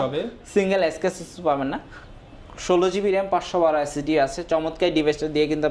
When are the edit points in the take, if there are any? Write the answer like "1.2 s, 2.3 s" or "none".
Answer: none